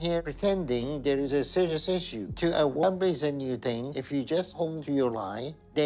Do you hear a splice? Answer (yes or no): no